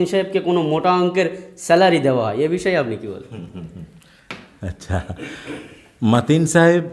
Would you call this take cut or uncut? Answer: uncut